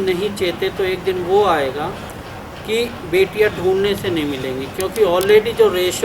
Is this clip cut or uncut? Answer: uncut